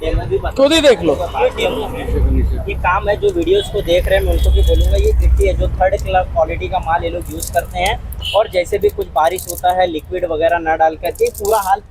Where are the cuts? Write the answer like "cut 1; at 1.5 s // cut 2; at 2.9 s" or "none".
none